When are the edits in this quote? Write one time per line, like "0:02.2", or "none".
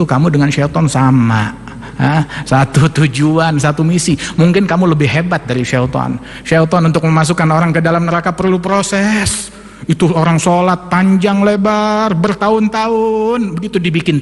none